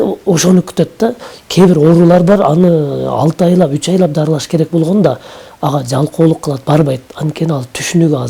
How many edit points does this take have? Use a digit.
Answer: 0